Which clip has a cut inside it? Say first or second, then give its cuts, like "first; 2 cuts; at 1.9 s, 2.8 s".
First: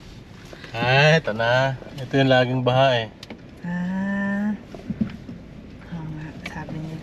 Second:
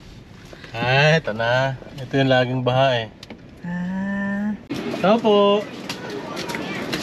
second; 1 cut; at 4.7 s